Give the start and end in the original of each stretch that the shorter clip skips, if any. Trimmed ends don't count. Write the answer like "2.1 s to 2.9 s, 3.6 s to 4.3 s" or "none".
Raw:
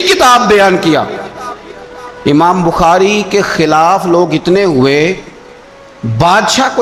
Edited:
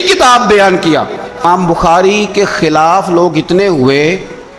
1.4 s to 2.4 s